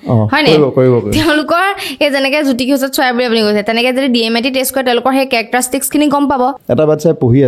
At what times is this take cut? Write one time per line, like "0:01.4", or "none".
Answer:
0:06.6